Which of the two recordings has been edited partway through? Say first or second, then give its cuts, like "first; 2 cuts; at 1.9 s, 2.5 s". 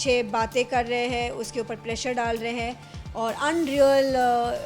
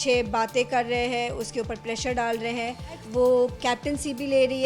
second; 1 cut; at 3.0 s